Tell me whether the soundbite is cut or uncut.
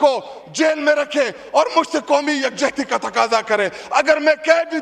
uncut